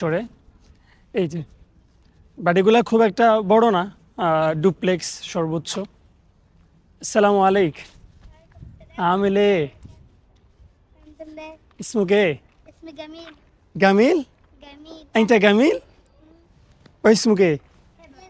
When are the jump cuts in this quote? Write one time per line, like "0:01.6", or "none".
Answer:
none